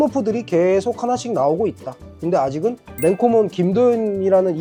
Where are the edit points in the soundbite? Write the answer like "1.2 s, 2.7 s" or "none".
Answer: none

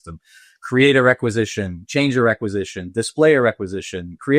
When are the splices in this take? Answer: none

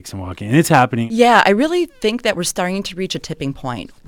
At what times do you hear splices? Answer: 1.1 s

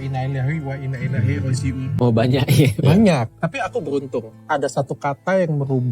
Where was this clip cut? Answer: 1.9 s

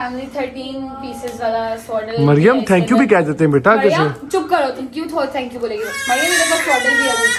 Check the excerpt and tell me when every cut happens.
none

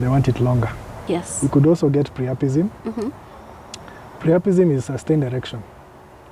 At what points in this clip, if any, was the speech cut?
0.9 s

